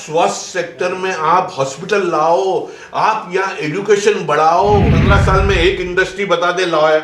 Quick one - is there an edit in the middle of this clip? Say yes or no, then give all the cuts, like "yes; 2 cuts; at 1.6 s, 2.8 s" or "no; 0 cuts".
yes; 1 cut; at 5.0 s